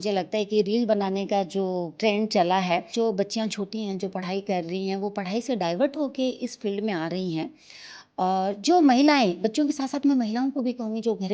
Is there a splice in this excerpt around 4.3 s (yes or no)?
no